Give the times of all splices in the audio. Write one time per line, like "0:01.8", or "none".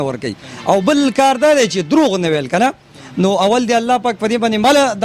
none